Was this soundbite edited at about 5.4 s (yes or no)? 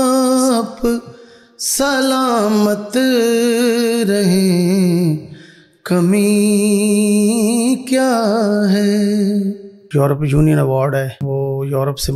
no